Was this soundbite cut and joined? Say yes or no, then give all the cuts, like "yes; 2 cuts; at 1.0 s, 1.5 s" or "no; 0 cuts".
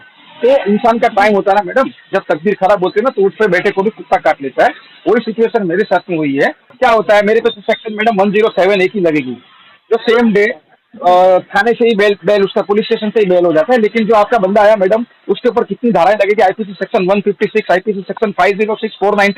yes; 1 cut; at 6.6 s